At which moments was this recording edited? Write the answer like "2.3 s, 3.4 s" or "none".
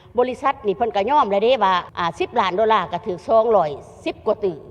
1.9 s